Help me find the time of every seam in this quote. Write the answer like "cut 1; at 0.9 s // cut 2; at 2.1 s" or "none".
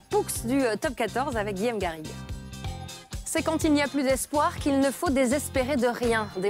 none